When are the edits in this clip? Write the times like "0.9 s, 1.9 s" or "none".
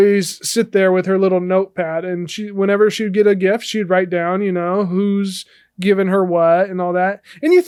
none